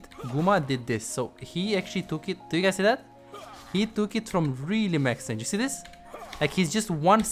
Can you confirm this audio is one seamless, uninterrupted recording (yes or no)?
yes